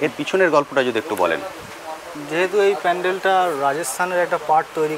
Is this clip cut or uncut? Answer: uncut